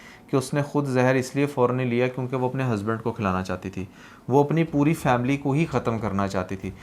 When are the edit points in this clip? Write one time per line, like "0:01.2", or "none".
none